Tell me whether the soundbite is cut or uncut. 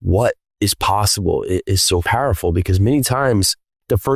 cut